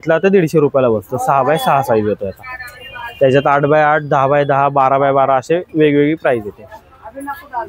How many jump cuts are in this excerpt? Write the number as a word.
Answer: zero